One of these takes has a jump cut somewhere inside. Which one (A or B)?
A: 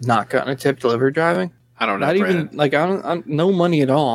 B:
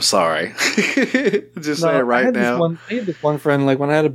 A